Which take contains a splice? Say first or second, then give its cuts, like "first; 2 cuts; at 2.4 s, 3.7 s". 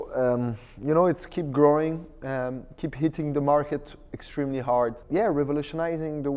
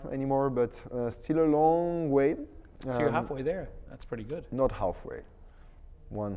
first; 1 cut; at 5.0 s